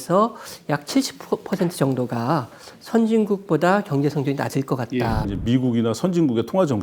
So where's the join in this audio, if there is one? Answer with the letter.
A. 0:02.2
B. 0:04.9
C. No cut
B